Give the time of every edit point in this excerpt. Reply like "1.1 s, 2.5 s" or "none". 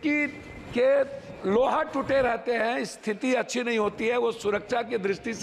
none